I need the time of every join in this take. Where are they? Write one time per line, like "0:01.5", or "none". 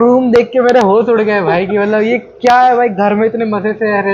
none

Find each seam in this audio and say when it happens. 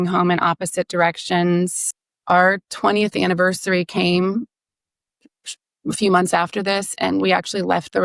0:01.9

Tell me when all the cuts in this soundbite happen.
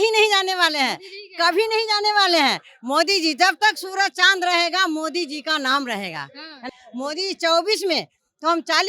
0:06.8

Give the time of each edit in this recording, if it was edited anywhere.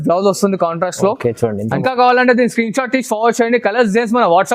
0:01.8

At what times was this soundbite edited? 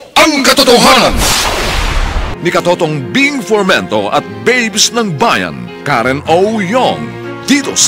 0:02.3

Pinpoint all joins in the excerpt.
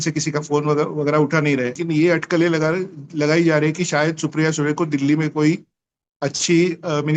0:01.8

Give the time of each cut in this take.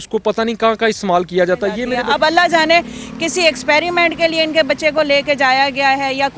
0:01.9

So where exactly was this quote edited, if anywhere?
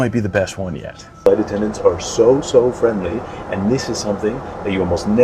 0:01.3

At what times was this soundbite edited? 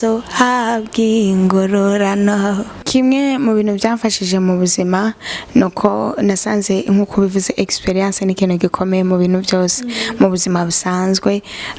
0:02.8

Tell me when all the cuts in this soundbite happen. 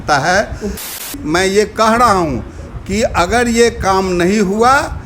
0:01.0

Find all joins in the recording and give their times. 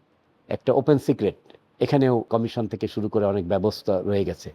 0:02.3

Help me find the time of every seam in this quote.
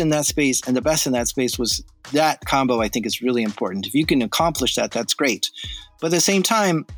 none

